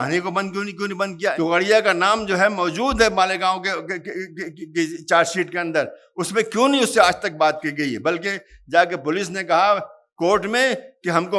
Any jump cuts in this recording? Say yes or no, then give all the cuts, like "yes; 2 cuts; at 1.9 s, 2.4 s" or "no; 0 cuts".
yes; 1 cut; at 1.3 s